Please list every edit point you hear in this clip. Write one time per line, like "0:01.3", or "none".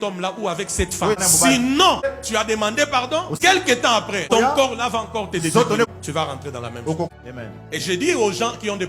0:01.2
0:02.1
0:03.4
0:04.3
0:05.9
0:07.1

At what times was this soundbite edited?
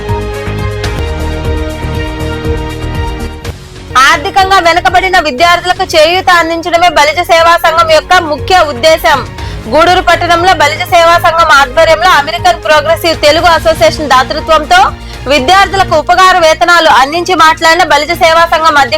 0:01.0

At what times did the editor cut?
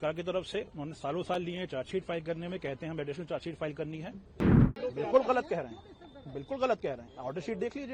0:04.7

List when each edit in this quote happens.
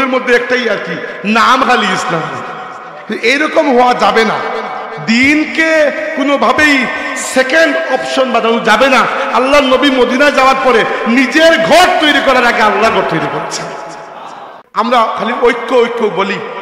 0:14.6

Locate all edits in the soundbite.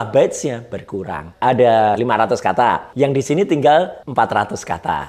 0:01.2
0:02.4
0:04.0

